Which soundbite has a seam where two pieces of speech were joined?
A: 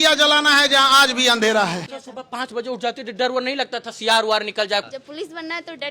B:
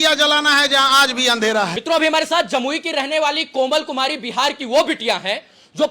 A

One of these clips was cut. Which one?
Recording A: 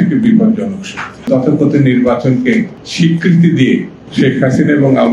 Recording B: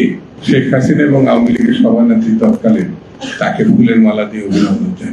A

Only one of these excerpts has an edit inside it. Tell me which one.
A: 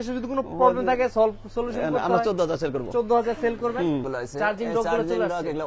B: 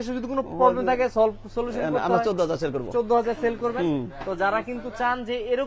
A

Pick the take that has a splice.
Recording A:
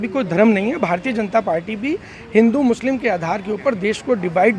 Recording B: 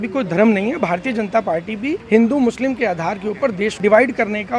B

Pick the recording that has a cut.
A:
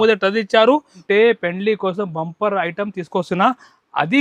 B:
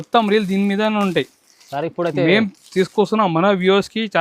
A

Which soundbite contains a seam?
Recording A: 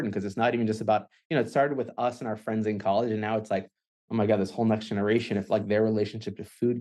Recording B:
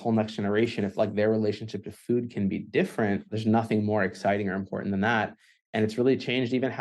B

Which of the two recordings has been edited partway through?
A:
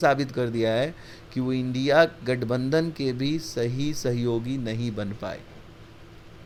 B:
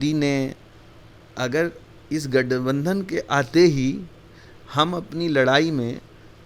B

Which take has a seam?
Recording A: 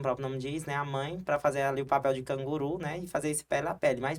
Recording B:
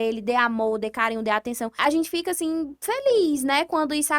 B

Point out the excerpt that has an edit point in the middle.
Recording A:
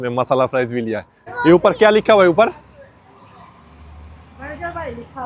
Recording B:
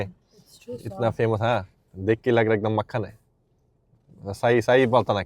A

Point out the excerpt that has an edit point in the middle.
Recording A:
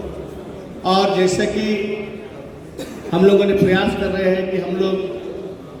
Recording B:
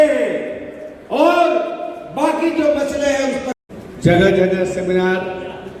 B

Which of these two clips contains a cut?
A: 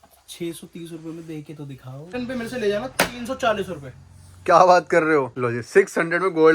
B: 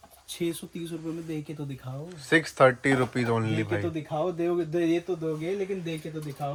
A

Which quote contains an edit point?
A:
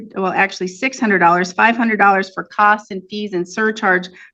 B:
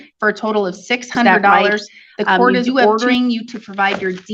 B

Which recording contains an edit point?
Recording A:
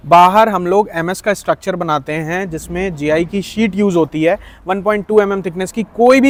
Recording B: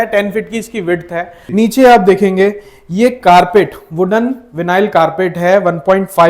B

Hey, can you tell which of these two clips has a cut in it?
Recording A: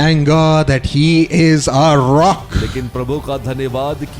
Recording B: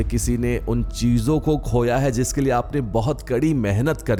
A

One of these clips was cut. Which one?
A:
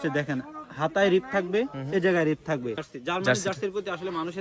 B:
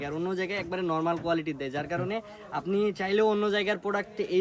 A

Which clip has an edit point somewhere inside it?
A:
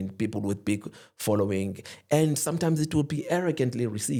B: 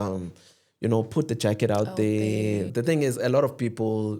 B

